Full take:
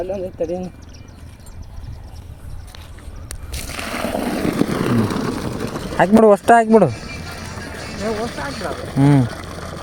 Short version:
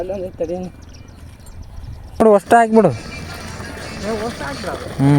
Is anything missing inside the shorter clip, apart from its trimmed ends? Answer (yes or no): yes